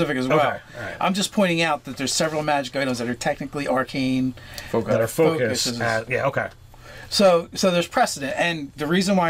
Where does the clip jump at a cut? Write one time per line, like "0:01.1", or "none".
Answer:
none